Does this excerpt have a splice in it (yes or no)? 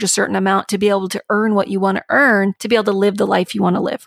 yes